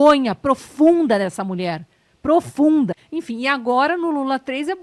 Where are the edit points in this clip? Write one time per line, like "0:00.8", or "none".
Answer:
0:02.9